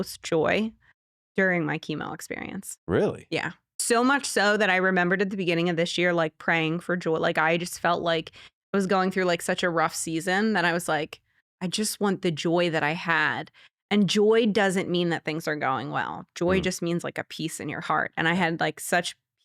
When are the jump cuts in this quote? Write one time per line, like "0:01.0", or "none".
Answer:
0:03.8